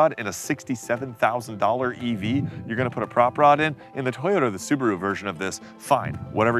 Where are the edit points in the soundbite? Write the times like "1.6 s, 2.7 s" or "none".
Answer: none